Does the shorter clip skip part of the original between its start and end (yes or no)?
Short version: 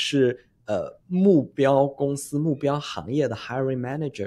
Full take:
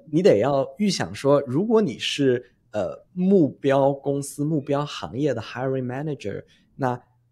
no